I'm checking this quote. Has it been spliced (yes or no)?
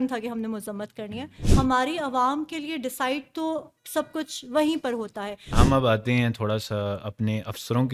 yes